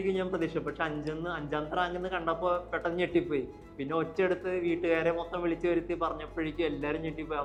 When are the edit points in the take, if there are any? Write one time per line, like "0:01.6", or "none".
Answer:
none